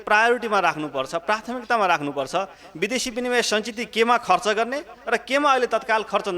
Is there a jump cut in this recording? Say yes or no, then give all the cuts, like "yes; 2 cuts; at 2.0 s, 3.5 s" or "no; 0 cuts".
no; 0 cuts